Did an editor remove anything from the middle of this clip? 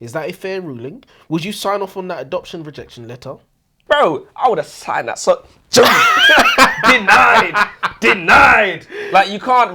yes; 1 cut; at 3.8 s

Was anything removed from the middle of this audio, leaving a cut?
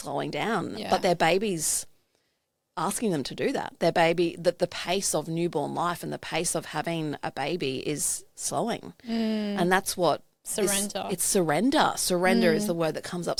no; 0 cuts

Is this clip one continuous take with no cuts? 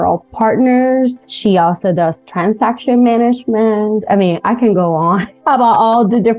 no; 3 cuts; at 1.3 s, 4.0 s, 5.3 s

